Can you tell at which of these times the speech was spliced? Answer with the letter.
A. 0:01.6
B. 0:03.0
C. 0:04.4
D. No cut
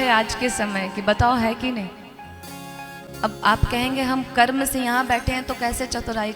B